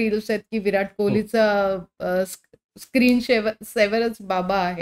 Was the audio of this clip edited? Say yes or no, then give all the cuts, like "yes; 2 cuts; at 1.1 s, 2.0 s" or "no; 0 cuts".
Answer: no; 0 cuts